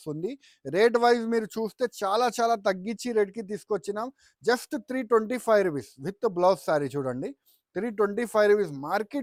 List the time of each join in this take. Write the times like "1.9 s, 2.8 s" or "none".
none